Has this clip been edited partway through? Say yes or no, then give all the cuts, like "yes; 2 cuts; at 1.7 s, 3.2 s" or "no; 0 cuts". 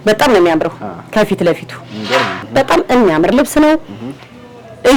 yes; 1 cut; at 2.4 s